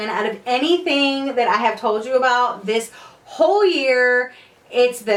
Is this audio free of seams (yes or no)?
yes